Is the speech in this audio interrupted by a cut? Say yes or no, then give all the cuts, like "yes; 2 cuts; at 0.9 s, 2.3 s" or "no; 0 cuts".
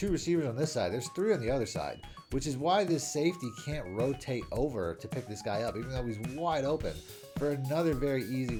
no; 0 cuts